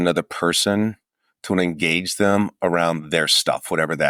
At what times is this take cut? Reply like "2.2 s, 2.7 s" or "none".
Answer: none